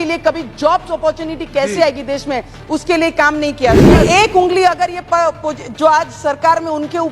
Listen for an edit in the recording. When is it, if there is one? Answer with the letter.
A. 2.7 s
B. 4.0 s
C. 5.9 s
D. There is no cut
B